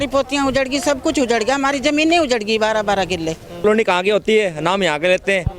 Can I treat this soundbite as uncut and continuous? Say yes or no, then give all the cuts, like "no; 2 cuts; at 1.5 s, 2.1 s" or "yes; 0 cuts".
no; 1 cut; at 3.6 s